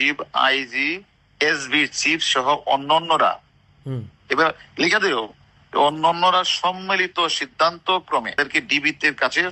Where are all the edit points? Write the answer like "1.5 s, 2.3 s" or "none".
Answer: 8.4 s